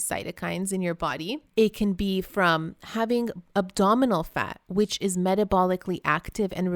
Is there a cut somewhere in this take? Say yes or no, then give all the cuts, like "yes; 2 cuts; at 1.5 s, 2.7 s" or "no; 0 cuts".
yes; 1 cut; at 1.5 s